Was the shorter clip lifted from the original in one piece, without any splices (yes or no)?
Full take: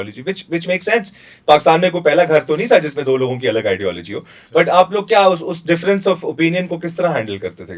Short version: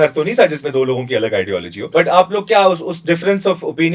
no